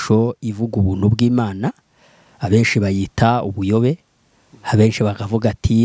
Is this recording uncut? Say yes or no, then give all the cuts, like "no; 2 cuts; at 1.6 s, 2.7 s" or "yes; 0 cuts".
yes; 0 cuts